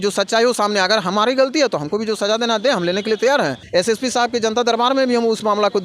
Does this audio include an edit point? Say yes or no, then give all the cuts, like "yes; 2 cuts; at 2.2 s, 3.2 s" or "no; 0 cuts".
yes; 1 cut; at 3.6 s